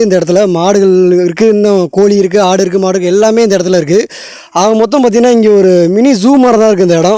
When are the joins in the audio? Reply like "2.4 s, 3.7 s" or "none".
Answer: none